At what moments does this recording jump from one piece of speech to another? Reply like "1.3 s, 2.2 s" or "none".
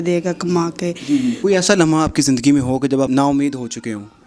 1.4 s, 3.1 s